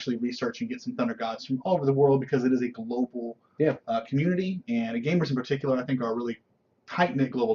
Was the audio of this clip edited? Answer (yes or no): yes